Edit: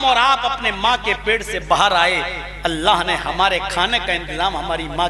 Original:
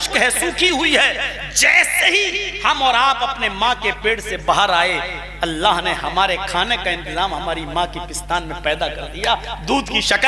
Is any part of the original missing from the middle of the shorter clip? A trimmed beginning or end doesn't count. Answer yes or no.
no